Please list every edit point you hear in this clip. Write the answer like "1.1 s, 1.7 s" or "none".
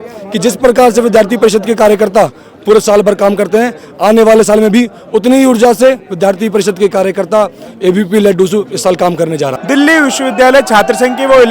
9.6 s